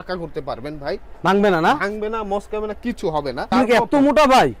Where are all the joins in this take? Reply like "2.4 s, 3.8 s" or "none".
3.5 s